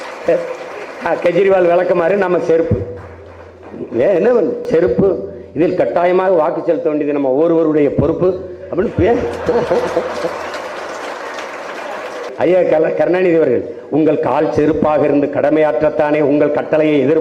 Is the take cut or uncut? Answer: cut